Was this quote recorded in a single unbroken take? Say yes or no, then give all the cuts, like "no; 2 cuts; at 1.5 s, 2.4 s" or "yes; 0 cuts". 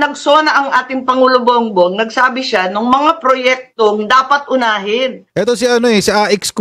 no; 1 cut; at 5.2 s